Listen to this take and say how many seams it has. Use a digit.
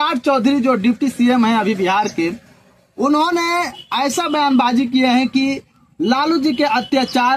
0